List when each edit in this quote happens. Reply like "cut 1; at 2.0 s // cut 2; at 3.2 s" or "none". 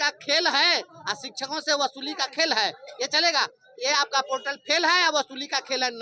none